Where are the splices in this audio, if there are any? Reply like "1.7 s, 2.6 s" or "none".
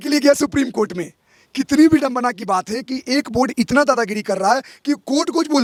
none